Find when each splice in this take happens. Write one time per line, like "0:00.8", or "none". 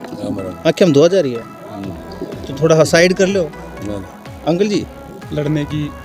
0:05.1